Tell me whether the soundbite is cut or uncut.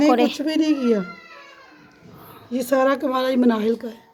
uncut